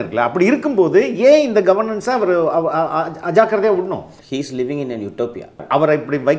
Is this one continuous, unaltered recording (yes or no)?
no